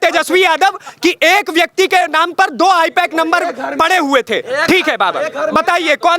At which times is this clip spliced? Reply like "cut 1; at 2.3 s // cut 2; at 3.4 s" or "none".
none